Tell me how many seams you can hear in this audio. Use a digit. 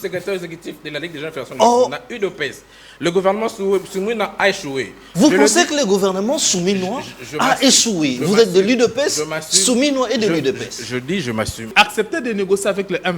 1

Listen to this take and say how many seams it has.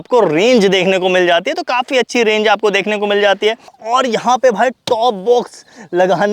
1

